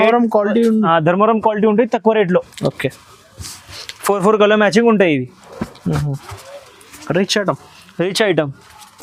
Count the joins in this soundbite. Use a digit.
0